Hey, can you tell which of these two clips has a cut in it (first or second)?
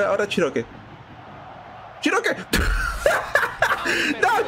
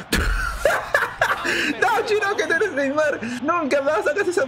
second